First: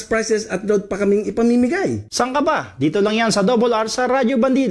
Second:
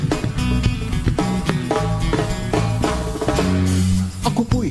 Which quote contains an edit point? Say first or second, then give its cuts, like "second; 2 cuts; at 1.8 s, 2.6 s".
second; 1 cut; at 0.9 s